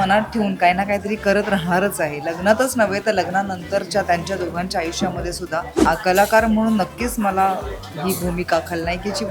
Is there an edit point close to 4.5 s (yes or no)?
no